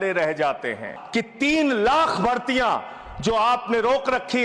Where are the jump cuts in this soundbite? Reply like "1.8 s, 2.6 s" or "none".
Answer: 0.9 s